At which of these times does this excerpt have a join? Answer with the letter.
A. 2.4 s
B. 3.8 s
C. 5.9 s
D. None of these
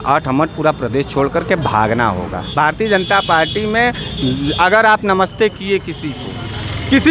A